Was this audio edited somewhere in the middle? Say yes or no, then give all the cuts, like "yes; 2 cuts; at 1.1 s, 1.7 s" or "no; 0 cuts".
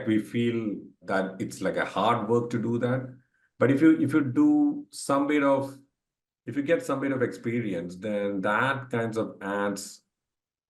yes; 1 cut; at 0.9 s